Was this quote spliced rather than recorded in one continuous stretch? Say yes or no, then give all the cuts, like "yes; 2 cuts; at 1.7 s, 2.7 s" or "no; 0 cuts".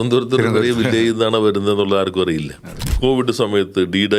yes; 1 cut; at 2.8 s